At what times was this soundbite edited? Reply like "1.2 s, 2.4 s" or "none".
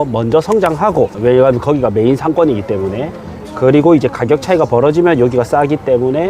1.1 s